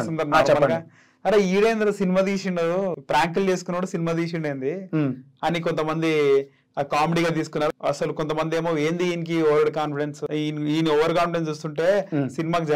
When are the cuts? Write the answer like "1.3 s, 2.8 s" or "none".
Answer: 3.0 s, 7.7 s, 10.2 s